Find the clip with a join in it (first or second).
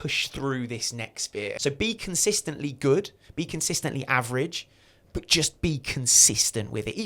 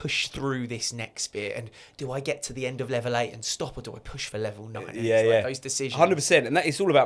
first